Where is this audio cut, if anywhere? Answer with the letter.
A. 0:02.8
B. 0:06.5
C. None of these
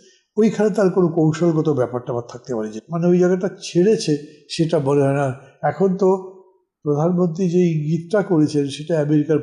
A